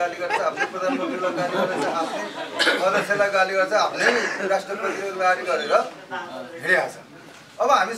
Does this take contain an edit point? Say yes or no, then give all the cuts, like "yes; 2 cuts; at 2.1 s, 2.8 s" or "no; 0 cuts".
no; 0 cuts